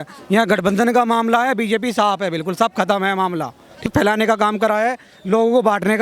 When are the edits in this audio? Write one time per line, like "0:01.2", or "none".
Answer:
0:03.8